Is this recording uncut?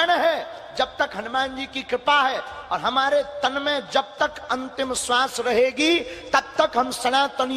no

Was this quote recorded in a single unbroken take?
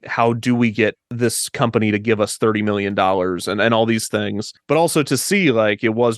no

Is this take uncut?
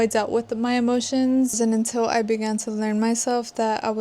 no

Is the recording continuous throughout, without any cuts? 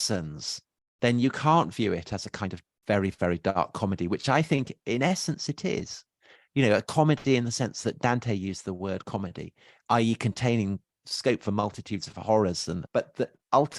no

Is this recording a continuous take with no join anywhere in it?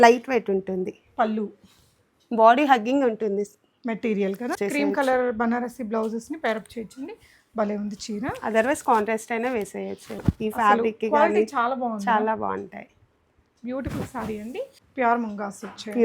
no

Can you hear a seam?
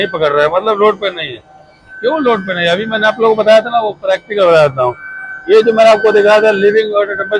no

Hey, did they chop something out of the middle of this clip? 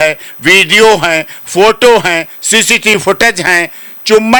no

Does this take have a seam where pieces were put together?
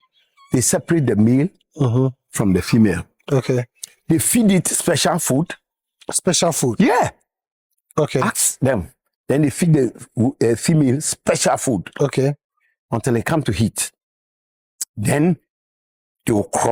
no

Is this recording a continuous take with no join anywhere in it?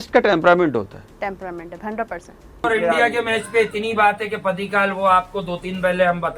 no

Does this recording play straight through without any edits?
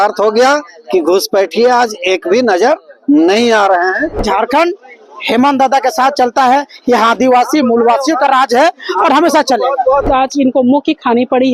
no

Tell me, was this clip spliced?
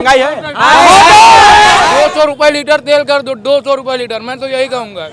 yes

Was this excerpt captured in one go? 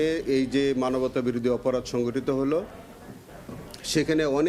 yes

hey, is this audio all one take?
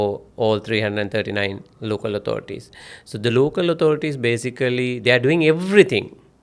yes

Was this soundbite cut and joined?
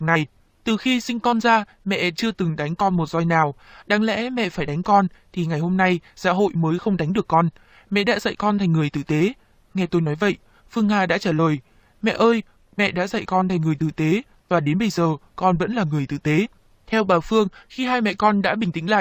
yes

